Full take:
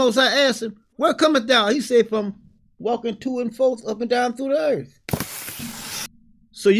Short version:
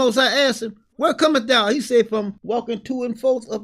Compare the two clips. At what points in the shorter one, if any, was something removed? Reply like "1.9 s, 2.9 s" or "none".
2.4 s

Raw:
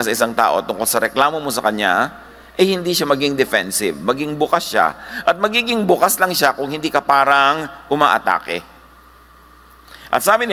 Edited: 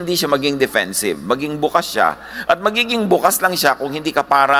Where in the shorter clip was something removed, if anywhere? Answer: none

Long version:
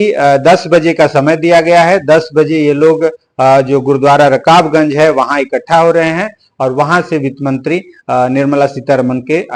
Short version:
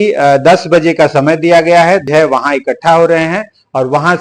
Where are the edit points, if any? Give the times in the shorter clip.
2.0 s

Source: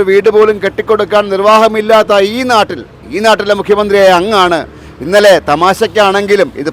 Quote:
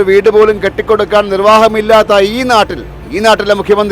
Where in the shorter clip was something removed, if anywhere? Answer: none

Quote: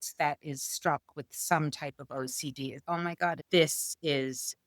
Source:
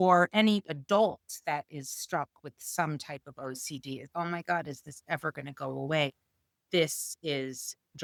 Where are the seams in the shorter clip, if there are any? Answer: 3.4 s

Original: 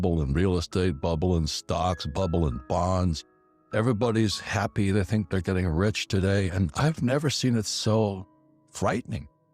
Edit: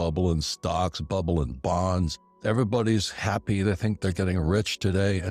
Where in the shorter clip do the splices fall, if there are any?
2.2 s

